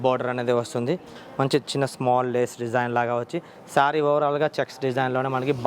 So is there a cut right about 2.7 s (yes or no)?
no